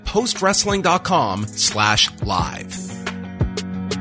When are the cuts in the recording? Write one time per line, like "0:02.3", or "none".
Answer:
0:02.6